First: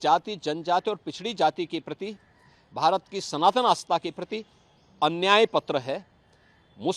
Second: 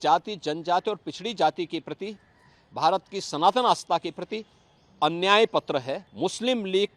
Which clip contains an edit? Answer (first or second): second